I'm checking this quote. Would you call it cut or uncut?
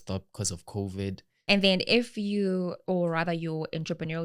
cut